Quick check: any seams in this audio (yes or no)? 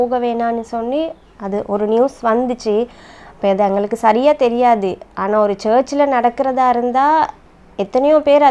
no